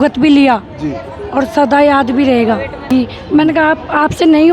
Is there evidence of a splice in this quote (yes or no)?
yes